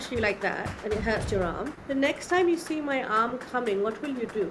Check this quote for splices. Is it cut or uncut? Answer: uncut